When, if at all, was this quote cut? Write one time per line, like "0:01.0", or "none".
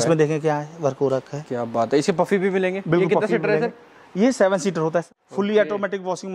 0:05.2

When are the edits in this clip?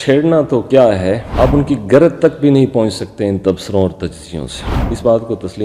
0:04.8

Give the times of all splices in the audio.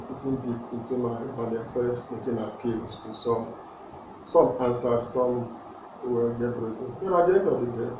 none

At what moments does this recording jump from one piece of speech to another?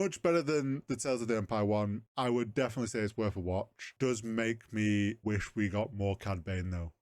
0:02.0
0:03.9
0:05.2

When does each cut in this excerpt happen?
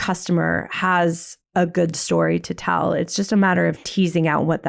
none

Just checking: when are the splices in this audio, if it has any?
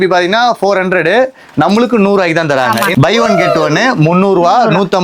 0:02.9

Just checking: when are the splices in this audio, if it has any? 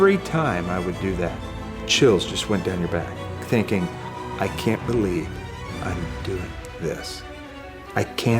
0:01.8

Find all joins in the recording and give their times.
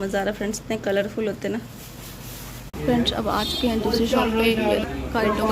0:02.7

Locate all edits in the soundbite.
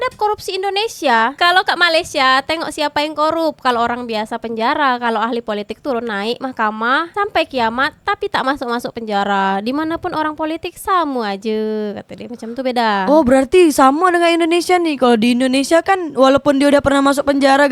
none

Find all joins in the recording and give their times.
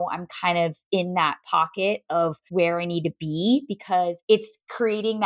0:02.4
0:04.2

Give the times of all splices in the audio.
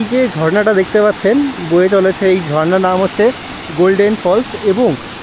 0:03.7

